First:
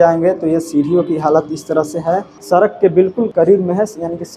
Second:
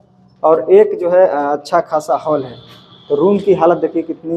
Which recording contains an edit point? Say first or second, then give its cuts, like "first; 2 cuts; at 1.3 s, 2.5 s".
first; 2 cuts; at 2.3 s, 3.3 s